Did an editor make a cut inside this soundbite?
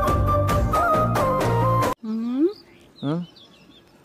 no; 0 cuts

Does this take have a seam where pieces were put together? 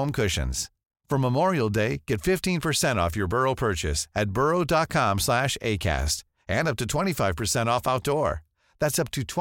no; 0 cuts

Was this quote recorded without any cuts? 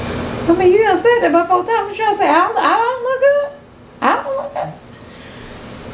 yes; 0 cuts

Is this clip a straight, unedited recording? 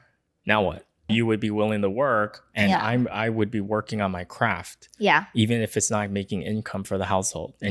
no; 1 cut; at 1.1 s

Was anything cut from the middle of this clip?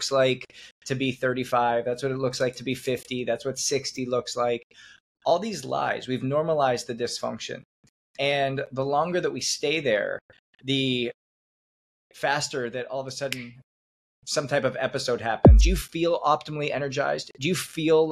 yes; 1 cut; at 15.5 s

